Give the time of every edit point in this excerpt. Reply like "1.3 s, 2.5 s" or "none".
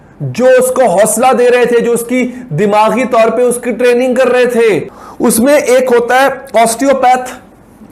4.9 s